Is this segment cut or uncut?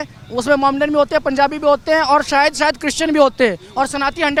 uncut